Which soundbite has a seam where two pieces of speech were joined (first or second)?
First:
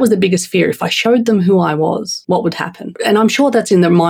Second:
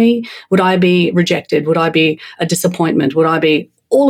first